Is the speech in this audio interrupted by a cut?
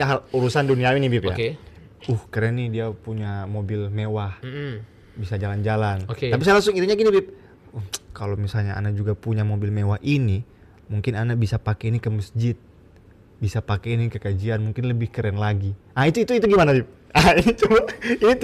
no; 0 cuts

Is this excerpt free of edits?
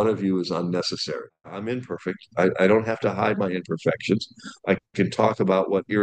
no; 1 cut; at 1.5 s

